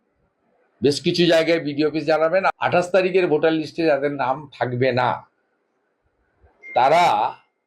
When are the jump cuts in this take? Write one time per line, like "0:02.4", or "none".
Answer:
0:02.6